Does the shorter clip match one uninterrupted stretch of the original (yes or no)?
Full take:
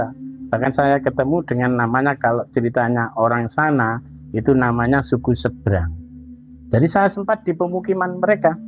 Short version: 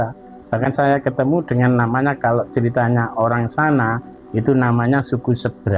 yes